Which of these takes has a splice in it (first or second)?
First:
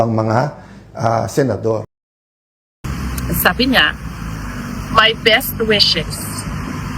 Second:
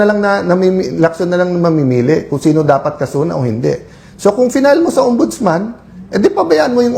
first